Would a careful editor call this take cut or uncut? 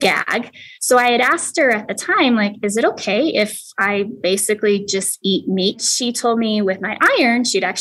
cut